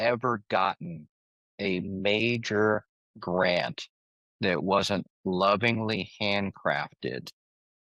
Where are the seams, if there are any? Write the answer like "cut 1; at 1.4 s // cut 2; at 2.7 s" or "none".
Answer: none